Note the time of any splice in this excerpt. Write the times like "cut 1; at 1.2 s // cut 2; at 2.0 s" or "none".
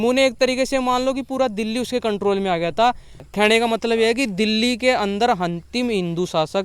none